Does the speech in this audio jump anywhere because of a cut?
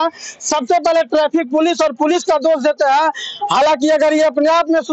no; 0 cuts

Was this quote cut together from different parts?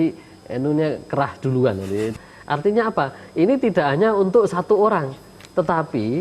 yes; 1 cut; at 2.2 s

